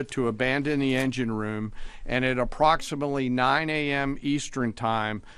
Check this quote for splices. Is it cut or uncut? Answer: uncut